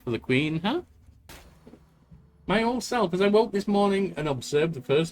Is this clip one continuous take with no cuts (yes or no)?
no